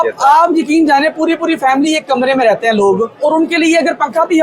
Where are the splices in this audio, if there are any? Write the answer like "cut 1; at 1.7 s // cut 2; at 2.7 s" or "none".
cut 1; at 3.1 s